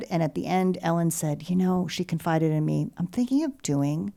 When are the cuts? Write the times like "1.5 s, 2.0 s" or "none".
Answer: none

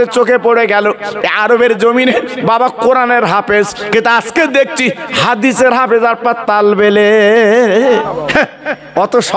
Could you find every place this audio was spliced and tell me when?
8.0 s

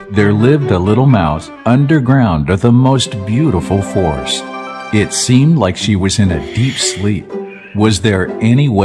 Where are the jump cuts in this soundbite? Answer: none

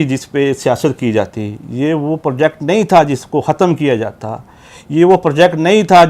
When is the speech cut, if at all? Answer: none

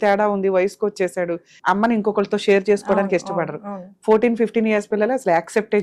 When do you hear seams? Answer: 1.5 s

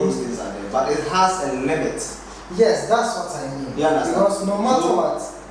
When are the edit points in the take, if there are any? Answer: none

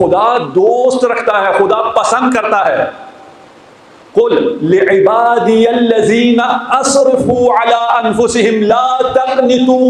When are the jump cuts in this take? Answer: none

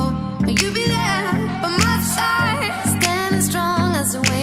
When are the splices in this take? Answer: none

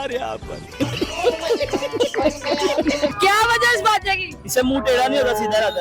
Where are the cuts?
3.1 s

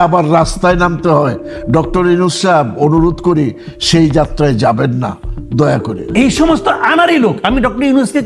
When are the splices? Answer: 6.1 s

